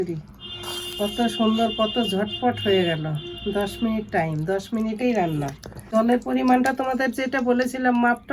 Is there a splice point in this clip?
yes; 1 cut; at 5.9 s

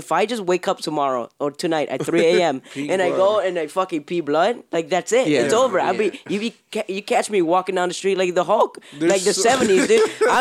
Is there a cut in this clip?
no; 0 cuts

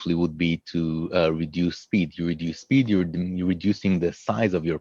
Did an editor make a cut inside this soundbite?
no; 0 cuts

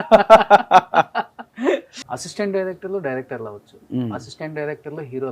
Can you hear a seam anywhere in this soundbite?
yes; 1 cut; at 2.0 s

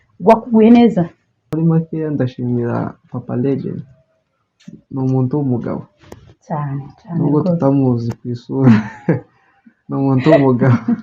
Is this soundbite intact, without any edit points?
no; 1 cut; at 1.5 s

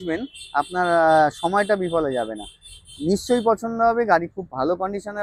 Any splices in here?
no; 0 cuts

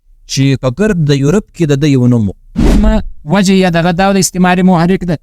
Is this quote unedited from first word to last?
no; 1 cut; at 2.9 s

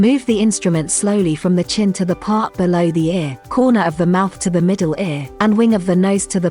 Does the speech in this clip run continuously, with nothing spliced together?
no; 2 cuts; at 3.4 s, 5.2 s

